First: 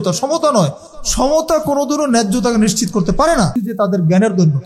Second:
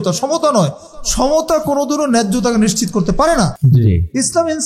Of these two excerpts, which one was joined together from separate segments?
first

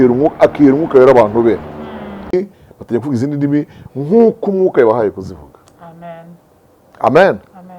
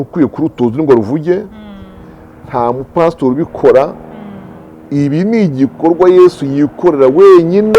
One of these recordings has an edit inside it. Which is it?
first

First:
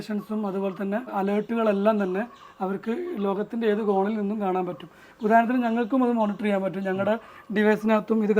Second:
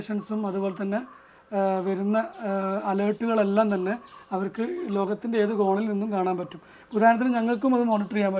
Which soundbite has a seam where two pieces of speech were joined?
first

